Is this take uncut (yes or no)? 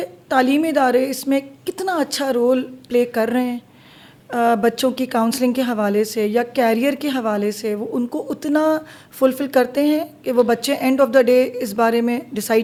yes